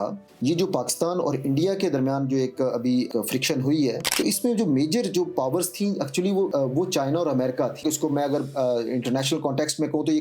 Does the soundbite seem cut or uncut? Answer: cut